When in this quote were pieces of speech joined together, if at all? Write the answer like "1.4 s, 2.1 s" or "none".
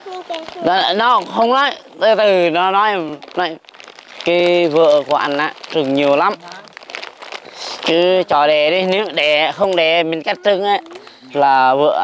none

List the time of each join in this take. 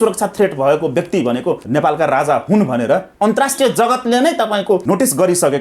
1.6 s, 3.1 s, 4.8 s

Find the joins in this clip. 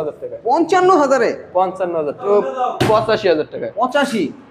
2.2 s

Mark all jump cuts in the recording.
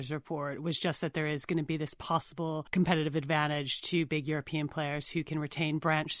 2.6 s

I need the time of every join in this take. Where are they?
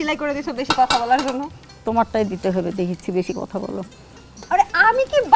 none

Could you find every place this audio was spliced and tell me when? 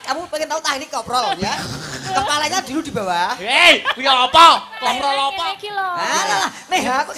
5.3 s

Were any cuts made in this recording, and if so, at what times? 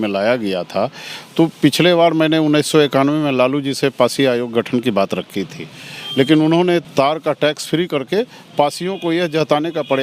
6.8 s

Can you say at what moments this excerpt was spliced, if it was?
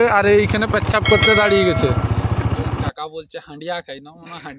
2.9 s

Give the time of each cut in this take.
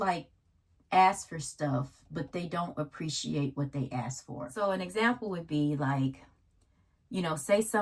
4.5 s

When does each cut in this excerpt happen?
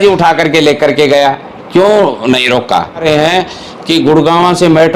3.0 s

